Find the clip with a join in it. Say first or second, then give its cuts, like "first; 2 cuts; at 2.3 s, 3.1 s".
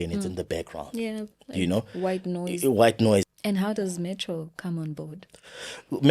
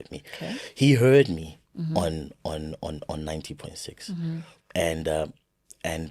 first; 1 cut; at 3.3 s